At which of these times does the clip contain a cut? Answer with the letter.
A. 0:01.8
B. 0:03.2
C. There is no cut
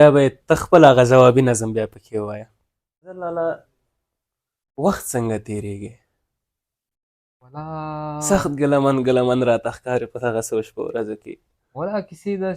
B